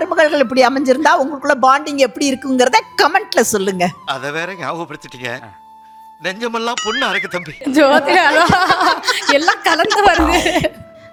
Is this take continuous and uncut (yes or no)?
yes